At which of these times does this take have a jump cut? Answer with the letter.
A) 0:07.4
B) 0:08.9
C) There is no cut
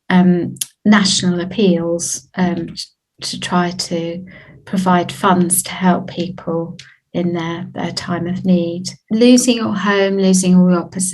B